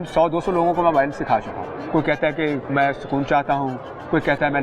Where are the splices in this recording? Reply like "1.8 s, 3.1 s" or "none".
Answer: 1.7 s, 2.6 s